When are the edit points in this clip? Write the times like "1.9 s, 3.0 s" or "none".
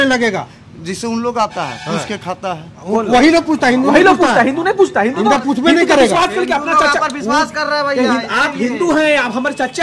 none